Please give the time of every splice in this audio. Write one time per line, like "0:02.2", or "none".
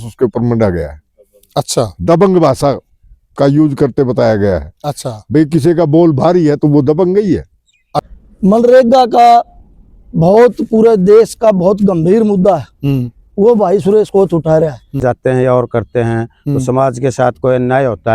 0:08.1
0:15.0